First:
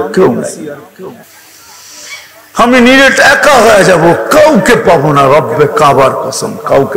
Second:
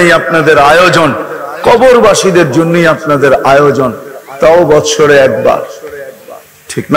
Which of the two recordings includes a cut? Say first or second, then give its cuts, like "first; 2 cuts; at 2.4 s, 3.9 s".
first; 1 cut; at 1.4 s